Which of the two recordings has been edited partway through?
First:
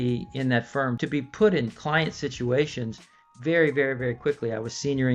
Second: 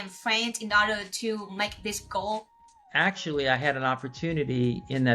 second; 1 cut; at 2.7 s

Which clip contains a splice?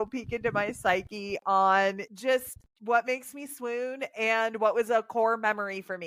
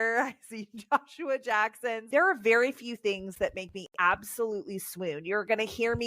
second; 1 cut; at 2.0 s

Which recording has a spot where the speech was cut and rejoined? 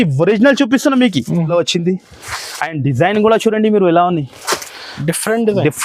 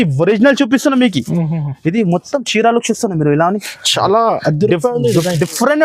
first; 1 cut; at 1.5 s

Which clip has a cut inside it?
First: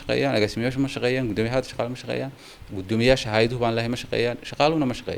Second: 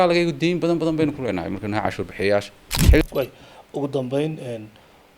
second; 1 cut; at 3.0 s

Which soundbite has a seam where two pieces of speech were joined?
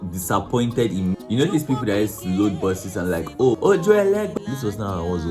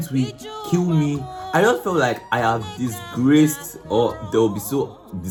first; 3 cuts; at 1.1 s, 3.6 s, 4.3 s

